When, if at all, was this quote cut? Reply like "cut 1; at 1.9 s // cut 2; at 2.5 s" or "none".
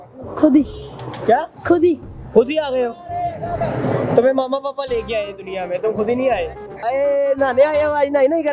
cut 1; at 6.8 s